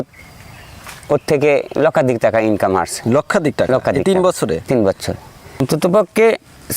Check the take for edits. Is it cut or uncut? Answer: cut